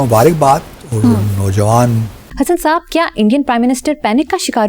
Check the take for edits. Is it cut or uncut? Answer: cut